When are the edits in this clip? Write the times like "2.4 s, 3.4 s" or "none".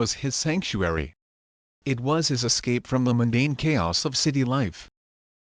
none